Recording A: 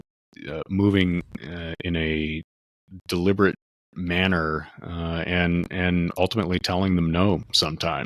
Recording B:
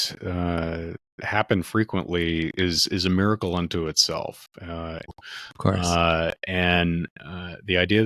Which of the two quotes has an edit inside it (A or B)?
B